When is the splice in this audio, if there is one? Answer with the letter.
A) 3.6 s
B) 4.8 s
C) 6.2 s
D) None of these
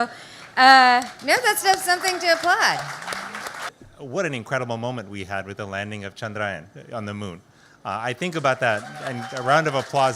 A